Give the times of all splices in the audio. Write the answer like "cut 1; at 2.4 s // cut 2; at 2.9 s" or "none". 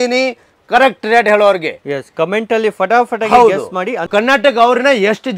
cut 1; at 4.1 s